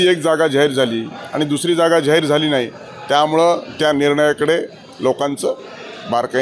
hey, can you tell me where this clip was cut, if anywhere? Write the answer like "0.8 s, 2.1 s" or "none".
none